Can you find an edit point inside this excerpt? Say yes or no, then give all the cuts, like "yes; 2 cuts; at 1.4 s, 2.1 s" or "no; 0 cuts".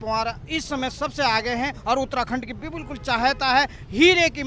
no; 0 cuts